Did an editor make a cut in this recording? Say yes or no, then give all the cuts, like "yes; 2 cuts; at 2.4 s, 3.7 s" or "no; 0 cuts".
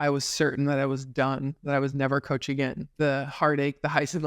yes; 1 cut; at 2.8 s